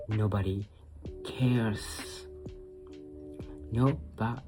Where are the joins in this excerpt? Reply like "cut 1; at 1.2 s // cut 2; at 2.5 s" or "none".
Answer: cut 1; at 1.7 s // cut 2; at 3.7 s